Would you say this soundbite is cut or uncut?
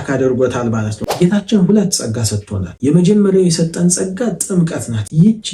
cut